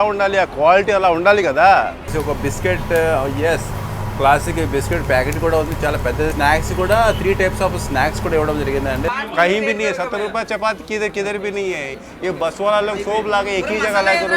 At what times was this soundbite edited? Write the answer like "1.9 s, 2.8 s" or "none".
2.1 s, 6.3 s, 9.1 s